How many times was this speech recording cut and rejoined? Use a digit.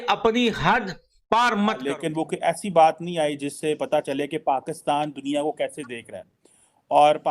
1